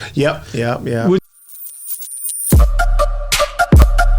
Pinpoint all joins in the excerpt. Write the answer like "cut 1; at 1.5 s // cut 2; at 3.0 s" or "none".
cut 1; at 1.2 s